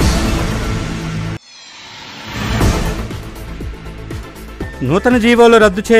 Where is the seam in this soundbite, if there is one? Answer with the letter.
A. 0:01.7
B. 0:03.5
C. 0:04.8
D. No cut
D